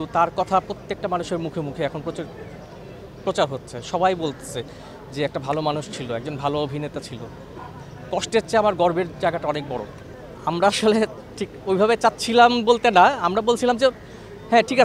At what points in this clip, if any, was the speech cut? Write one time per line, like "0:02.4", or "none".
none

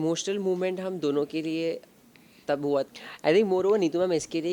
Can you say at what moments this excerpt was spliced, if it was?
0:02.9

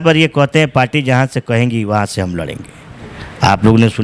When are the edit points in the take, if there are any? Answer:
none

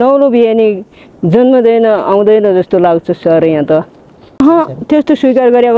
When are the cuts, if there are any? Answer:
0:04.4

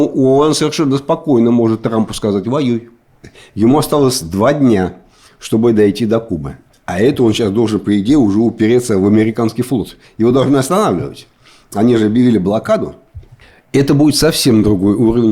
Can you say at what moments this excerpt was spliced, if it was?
0:03.2

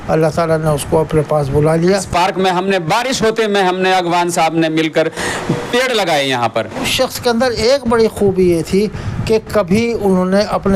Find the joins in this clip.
0:02.0
0:06.9

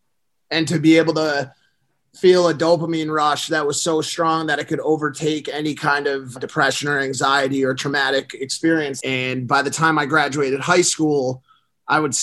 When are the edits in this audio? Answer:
0:06.4
0:09.0

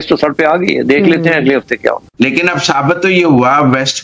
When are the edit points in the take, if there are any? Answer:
0:02.1

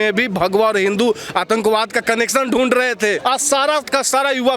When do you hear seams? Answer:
0:03.2

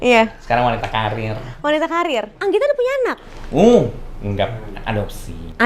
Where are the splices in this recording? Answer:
0:02.3

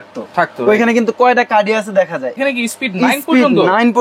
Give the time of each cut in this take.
0:02.4

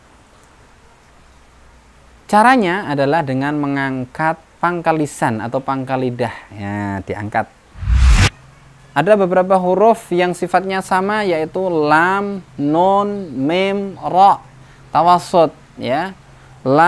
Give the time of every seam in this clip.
0:08.0

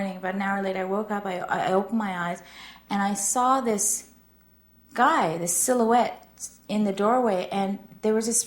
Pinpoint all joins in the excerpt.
none

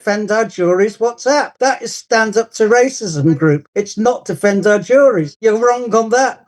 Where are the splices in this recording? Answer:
0:01.9
0:03.7
0:05.3

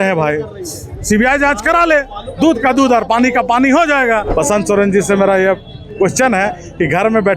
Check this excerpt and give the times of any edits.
0:04.3

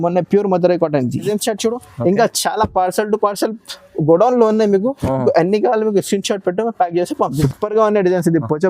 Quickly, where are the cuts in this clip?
0:01.3
0:07.4

